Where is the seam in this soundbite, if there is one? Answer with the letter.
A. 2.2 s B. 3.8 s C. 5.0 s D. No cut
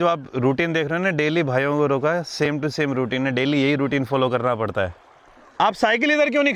D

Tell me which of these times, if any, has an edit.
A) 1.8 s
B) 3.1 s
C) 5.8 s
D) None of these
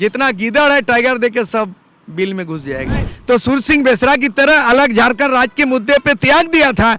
B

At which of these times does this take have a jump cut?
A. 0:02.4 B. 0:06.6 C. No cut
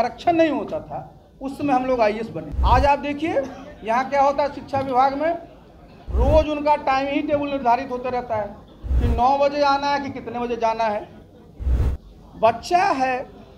A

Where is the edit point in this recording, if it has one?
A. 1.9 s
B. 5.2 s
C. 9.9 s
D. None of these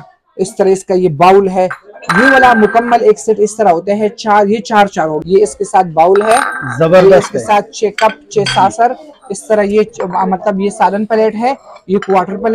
B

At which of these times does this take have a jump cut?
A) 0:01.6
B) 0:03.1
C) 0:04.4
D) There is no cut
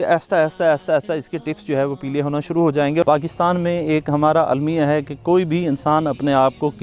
B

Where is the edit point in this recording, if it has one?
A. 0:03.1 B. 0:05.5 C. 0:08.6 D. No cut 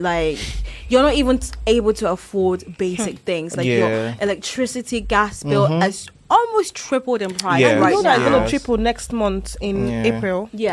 D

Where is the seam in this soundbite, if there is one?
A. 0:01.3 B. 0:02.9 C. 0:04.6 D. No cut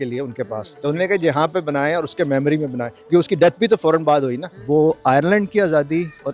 C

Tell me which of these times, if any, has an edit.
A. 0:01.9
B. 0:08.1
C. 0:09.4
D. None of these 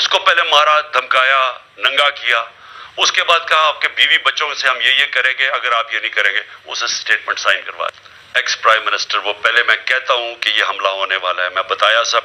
B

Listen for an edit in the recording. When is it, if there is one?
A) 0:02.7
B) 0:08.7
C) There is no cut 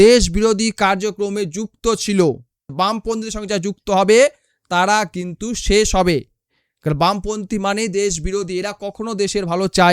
A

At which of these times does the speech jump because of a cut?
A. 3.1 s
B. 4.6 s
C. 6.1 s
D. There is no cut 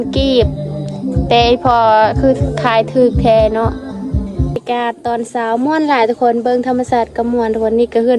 B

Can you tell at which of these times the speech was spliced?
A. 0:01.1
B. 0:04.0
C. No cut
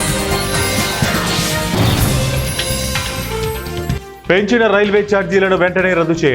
B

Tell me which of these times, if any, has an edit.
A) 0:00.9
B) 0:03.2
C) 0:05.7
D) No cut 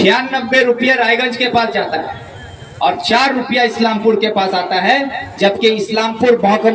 D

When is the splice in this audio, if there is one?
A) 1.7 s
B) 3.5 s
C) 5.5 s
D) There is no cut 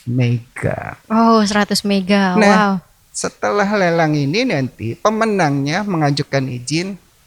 D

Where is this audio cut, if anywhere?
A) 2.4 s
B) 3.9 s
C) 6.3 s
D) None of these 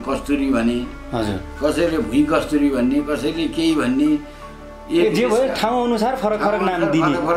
D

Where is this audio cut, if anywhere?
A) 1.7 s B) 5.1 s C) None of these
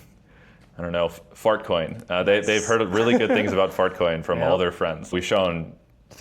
B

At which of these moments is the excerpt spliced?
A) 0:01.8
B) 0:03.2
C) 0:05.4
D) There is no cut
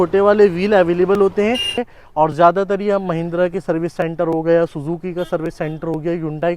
A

